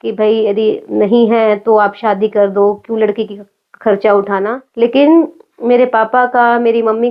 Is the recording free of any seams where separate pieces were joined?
no; 1 cut; at 4.6 s

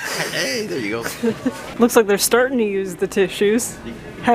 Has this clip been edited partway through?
no; 0 cuts

